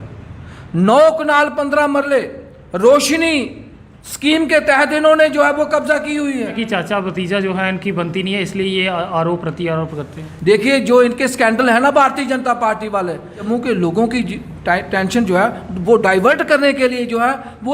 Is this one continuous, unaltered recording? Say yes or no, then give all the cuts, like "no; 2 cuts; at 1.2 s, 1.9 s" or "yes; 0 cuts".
no; 2 cuts; at 6.6 s, 13.4 s